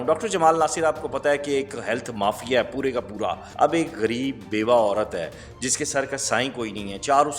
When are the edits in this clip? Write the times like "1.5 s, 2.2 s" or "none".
3.4 s